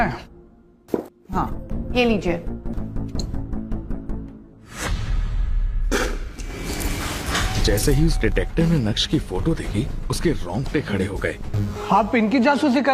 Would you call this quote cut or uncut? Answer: cut